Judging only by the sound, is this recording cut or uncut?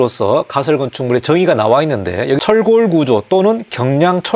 cut